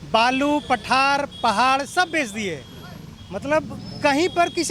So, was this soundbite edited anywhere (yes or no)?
no